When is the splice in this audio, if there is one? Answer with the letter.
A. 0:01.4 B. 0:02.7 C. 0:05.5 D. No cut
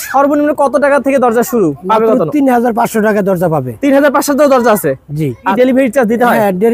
C